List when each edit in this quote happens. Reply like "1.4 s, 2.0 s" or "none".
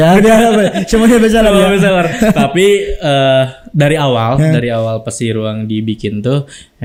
none